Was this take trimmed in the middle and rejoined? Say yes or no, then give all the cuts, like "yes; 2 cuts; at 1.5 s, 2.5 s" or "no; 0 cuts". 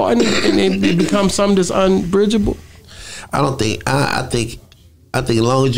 no; 0 cuts